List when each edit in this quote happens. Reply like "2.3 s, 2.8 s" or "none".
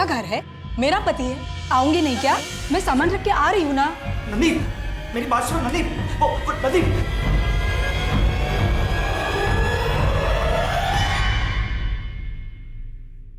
2.5 s